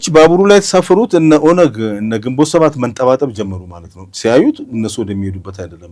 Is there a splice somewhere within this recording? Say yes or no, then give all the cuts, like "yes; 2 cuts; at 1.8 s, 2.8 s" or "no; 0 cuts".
no; 0 cuts